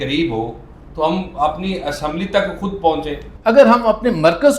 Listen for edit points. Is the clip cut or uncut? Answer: cut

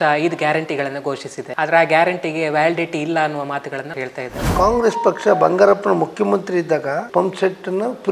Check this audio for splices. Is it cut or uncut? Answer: cut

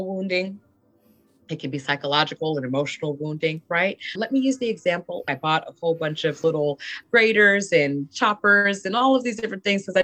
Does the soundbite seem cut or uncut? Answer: cut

